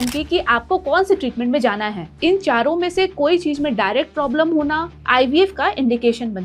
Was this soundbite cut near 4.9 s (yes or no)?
yes